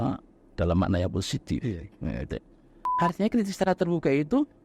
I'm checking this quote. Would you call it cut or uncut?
cut